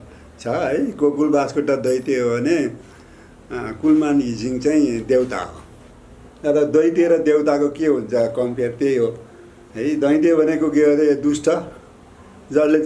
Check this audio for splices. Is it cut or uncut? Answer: uncut